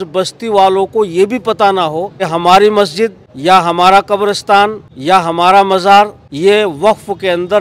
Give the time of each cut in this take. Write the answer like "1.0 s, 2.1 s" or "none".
2.3 s, 3.3 s, 4.9 s, 6.2 s